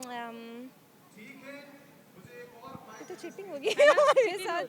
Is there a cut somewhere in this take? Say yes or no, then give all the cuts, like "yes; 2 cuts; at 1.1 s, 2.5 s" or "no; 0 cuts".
no; 0 cuts